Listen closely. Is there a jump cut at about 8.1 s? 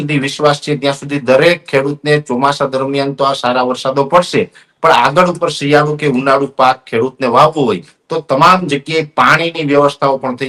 no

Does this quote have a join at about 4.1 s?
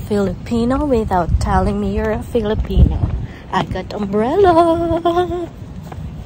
no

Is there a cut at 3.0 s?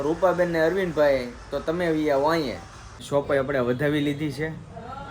yes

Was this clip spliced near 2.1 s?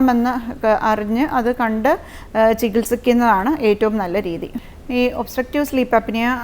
no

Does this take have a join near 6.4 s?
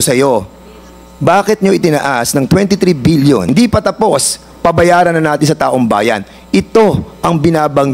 no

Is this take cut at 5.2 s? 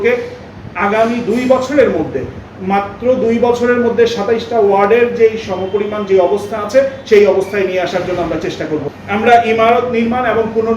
no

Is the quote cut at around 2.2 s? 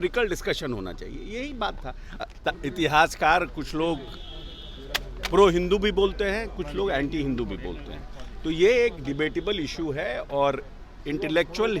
yes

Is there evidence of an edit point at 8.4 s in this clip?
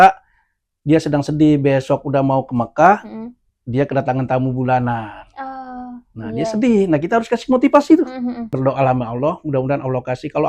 yes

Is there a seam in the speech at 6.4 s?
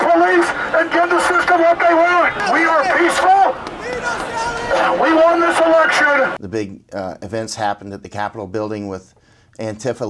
yes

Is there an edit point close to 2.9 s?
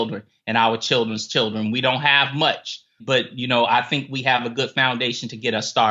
yes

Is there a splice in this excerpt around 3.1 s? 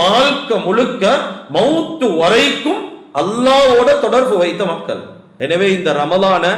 no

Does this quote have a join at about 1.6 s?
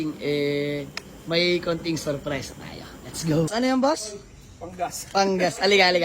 no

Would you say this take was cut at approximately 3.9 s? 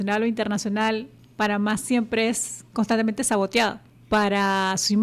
yes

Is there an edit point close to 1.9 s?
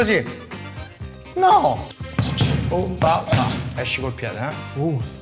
yes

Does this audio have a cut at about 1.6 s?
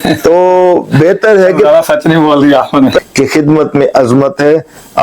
no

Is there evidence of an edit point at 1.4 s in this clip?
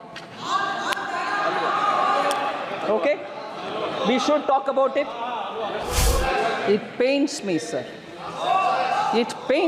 no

